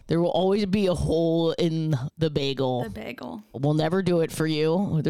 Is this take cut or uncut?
cut